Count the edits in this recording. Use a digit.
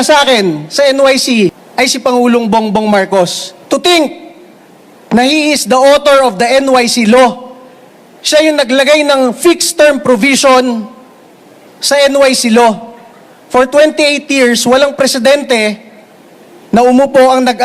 1